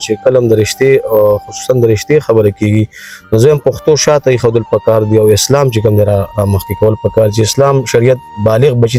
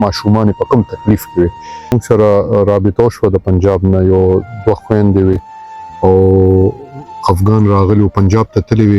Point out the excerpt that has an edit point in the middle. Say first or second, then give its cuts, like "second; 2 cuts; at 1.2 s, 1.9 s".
second; 1 cut; at 2.0 s